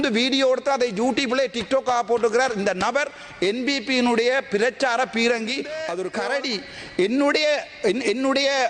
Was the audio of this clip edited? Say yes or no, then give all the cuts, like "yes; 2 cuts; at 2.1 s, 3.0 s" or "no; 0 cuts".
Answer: yes; 1 cut; at 6.0 s